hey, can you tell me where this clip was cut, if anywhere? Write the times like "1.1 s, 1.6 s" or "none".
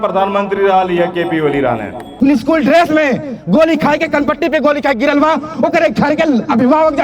2.0 s